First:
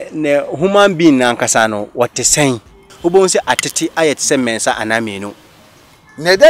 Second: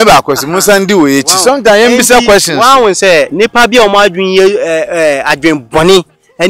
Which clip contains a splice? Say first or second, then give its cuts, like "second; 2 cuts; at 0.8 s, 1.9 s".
first; 1 cut; at 2.9 s